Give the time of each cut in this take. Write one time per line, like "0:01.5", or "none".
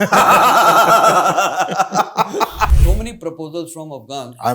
0:02.8